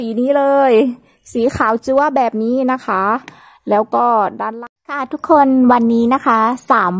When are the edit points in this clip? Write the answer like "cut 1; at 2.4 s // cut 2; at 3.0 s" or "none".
cut 1; at 4.6 s